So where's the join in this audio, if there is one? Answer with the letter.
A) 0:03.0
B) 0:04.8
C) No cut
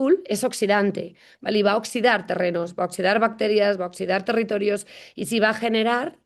C